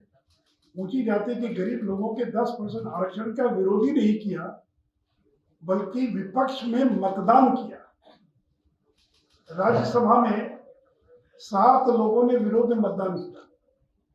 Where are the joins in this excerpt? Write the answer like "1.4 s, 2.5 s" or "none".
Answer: none